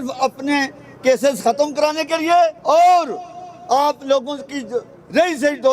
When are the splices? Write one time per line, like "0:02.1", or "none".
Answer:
0:02.6